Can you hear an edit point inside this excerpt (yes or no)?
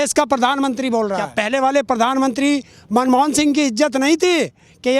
yes